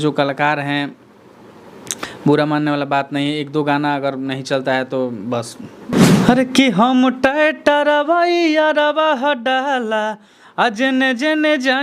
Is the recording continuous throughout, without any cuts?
no; 1 cut; at 6.0 s

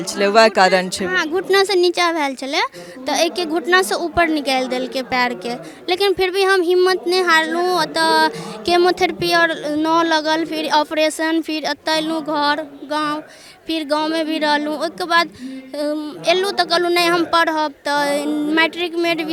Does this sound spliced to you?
no; 0 cuts

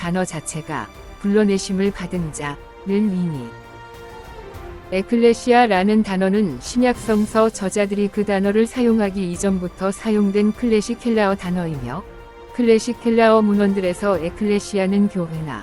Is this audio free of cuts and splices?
no; 2 cuts; at 3.5 s, 4.9 s

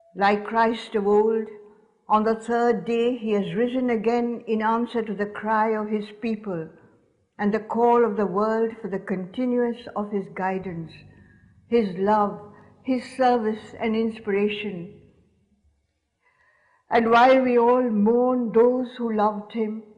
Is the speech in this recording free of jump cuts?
no; 1 cut; at 4.4 s

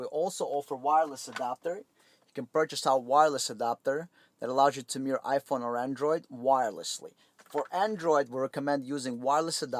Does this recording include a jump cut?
no; 0 cuts

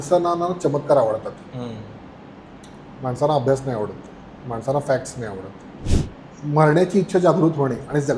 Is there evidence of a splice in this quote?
yes; 1 cut; at 5.9 s

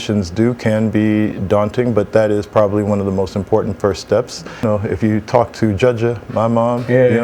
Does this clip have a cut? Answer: yes; 1 cut; at 4.6 s

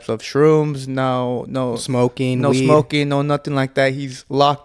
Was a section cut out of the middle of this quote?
no; 0 cuts

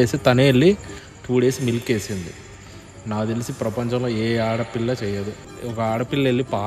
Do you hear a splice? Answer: yes; 1 cut; at 5.4 s

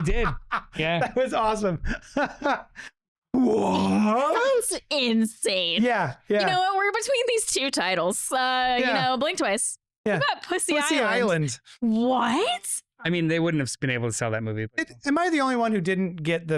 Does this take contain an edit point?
yes; 1 cut; at 12.6 s

